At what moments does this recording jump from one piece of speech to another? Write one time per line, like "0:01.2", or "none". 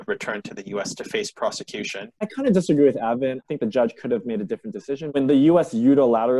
0:02.0
0:03.4
0:05.0